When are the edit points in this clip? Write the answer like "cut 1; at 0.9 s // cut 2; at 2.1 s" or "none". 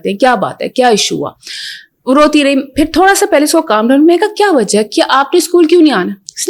none